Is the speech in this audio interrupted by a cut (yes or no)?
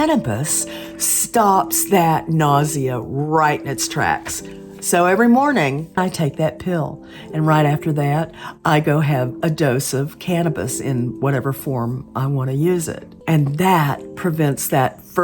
yes